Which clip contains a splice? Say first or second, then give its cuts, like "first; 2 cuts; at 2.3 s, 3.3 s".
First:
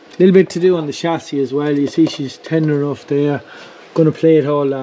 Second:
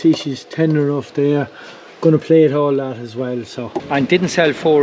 second; 1 cut; at 3.8 s